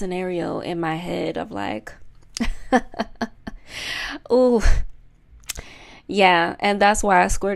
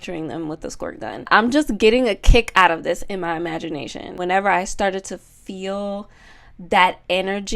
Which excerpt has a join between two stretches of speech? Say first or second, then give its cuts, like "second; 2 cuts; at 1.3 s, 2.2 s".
second; 2 cuts; at 1.3 s, 4.2 s